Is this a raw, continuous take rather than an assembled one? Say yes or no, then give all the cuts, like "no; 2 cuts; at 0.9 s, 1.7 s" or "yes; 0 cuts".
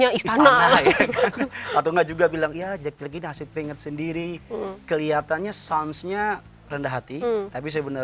yes; 0 cuts